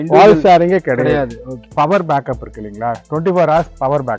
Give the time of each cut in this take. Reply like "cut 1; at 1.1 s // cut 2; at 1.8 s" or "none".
cut 1; at 1.7 s